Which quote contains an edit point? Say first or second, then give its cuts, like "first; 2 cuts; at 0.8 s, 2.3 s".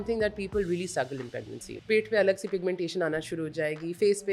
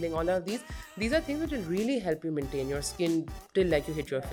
first; 1 cut; at 1.6 s